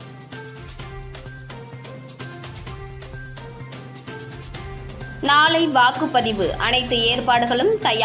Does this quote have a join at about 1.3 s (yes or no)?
yes